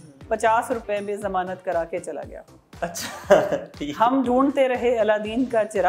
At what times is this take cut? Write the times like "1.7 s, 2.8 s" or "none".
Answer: none